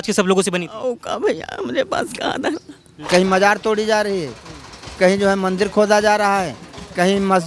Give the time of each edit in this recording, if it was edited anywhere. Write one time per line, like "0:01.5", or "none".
0:03.0